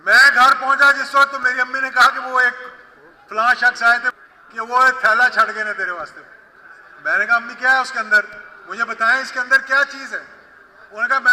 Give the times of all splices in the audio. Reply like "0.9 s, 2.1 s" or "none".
4.1 s